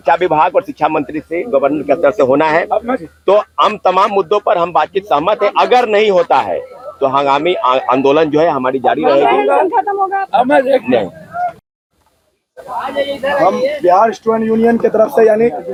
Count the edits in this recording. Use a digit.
0